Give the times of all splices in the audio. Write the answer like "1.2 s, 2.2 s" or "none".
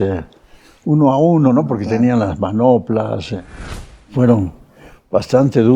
3.8 s